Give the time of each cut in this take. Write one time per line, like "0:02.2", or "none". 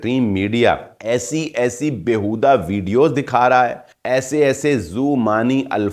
0:00.9
0:03.9